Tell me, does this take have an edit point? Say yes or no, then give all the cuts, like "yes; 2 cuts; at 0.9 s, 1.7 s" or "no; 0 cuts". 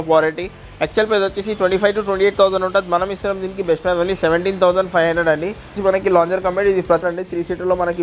yes; 2 cuts; at 5.8 s, 7.0 s